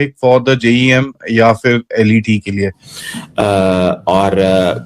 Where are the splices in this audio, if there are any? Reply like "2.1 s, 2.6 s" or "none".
2.9 s